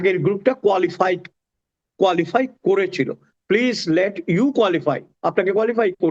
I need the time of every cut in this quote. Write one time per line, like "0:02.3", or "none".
none